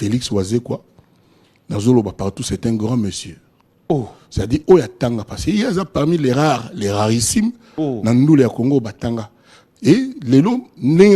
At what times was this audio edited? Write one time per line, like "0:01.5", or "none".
none